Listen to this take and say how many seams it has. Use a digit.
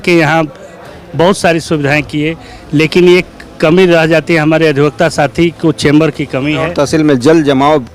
1